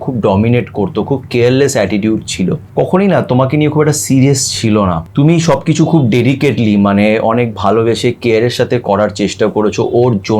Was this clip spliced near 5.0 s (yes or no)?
yes